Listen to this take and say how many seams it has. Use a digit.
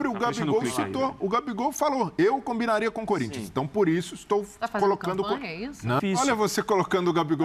1